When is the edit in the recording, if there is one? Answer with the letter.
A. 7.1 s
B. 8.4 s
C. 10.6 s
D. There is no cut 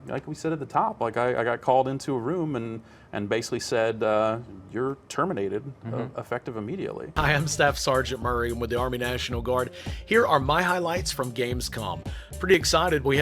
A